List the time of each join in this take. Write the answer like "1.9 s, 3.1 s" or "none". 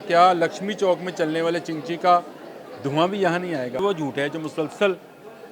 3.8 s

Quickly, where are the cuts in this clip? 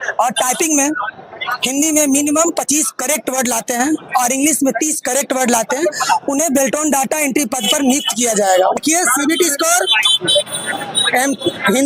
8.8 s

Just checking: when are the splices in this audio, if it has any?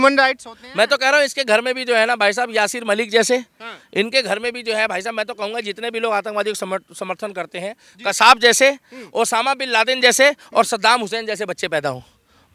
none

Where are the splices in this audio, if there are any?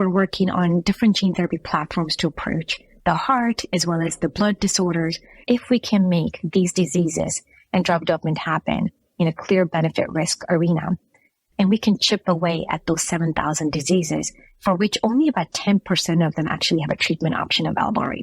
5.3 s, 11.4 s

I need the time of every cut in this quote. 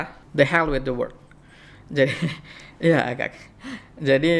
none

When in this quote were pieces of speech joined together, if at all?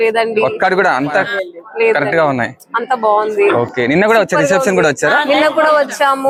none

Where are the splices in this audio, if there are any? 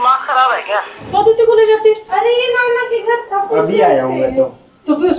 1.0 s

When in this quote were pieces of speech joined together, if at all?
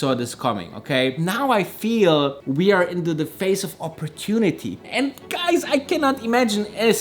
1.2 s, 4.8 s

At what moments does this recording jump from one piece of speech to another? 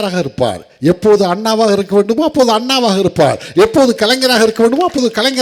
none

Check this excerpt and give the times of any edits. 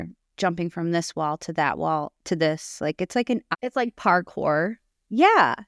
none

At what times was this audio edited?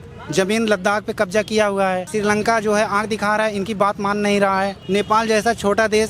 2.1 s, 4.8 s

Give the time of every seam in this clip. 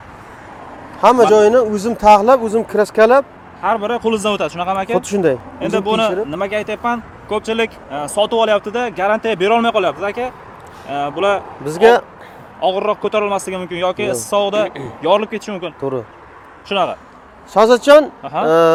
none

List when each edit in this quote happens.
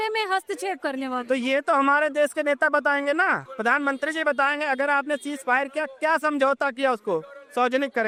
none

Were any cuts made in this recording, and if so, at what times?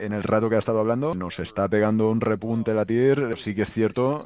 1.2 s, 3.3 s

